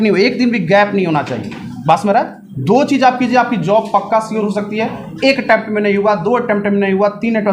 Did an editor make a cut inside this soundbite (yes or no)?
no